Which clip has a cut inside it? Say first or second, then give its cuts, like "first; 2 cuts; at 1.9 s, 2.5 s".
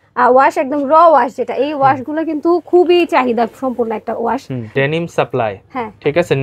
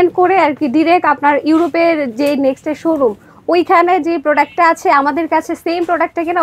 first; 1 cut; at 4.7 s